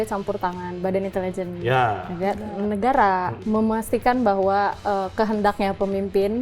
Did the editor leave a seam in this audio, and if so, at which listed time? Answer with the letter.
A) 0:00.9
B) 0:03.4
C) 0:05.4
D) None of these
B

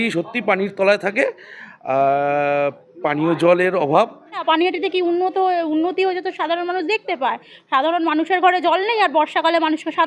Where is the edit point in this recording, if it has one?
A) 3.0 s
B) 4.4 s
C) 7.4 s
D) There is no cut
B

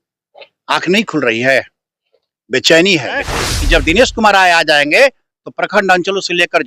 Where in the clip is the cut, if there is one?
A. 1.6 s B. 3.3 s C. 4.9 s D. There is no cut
B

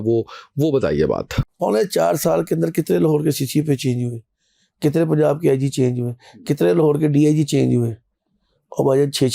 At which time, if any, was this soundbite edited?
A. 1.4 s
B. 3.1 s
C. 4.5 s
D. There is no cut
A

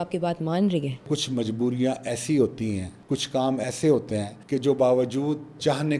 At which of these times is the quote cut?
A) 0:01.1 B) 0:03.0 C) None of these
A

